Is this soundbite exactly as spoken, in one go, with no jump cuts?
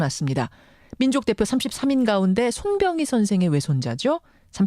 no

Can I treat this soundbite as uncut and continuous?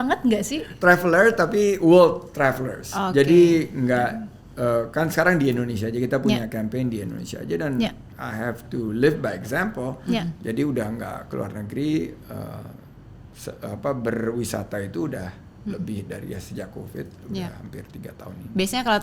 yes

